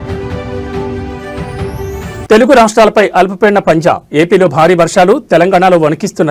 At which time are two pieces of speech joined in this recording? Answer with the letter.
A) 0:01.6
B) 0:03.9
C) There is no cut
A